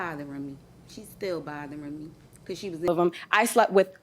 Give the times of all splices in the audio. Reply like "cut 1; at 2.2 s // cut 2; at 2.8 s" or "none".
cut 1; at 2.9 s